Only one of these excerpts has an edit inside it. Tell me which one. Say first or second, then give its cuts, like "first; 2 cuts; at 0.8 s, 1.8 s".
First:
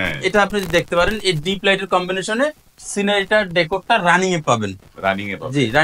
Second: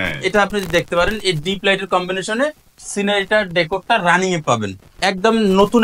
second; 1 cut; at 4.8 s